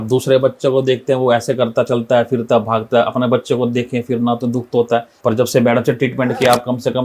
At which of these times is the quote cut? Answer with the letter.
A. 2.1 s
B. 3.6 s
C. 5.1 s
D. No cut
C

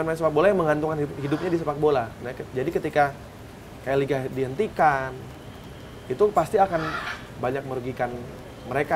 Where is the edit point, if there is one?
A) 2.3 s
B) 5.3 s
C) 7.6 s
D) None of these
D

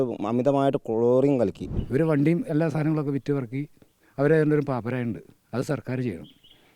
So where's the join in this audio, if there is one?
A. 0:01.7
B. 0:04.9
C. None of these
A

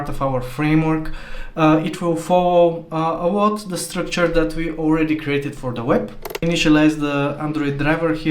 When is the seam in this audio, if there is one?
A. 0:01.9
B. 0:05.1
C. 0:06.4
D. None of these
C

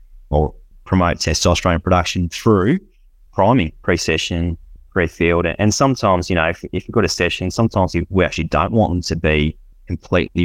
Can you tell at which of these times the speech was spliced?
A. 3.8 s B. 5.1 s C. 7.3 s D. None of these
A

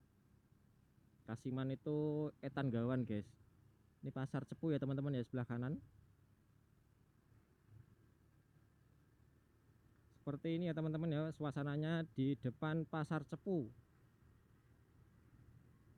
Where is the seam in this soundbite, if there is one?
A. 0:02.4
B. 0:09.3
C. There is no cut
C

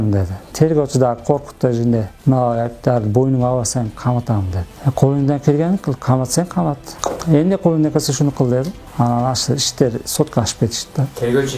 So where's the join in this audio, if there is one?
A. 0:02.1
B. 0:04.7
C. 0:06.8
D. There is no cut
D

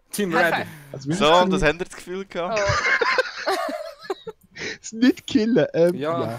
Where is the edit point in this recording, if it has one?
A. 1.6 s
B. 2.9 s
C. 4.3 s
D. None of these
D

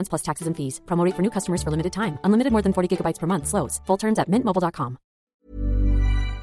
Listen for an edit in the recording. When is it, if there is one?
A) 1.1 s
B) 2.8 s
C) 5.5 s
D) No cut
C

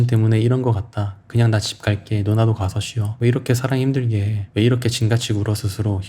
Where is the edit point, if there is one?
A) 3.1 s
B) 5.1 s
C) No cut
A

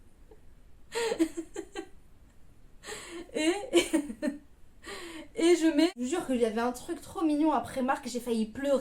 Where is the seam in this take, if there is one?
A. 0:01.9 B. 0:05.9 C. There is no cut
B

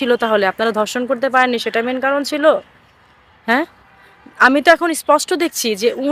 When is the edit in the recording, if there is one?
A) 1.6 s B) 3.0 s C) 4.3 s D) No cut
D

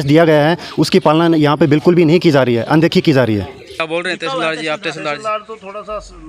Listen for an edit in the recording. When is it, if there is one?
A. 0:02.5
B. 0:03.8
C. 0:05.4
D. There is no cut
B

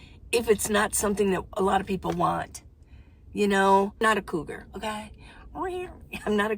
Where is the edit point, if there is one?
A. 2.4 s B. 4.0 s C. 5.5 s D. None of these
B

